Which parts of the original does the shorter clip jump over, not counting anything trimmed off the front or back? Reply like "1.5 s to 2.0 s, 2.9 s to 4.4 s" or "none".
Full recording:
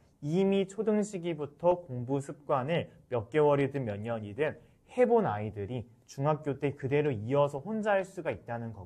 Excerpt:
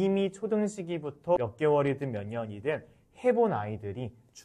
1.7 s to 3.1 s